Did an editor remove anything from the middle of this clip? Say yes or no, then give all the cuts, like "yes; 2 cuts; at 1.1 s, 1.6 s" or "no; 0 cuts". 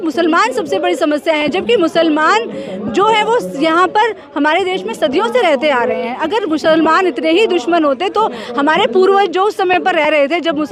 no; 0 cuts